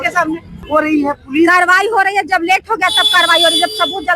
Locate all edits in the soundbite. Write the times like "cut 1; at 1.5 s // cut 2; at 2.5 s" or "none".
cut 1; at 0.9 s